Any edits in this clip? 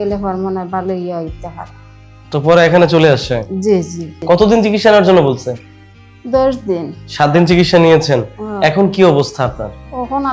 yes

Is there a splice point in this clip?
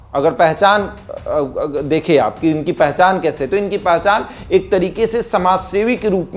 no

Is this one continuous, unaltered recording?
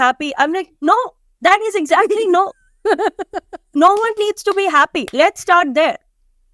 yes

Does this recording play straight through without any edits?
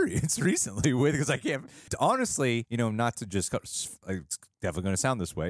no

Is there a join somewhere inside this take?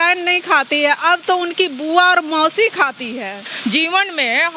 yes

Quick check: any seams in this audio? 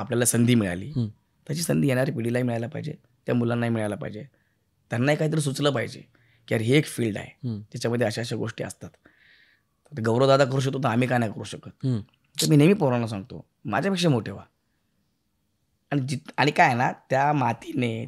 no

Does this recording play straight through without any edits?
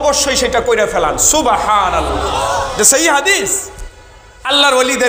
yes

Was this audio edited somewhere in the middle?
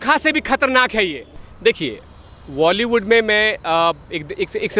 yes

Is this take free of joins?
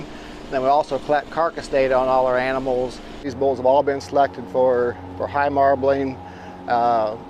no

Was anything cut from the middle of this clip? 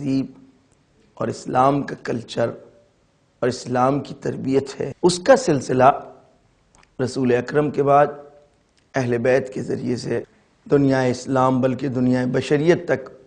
yes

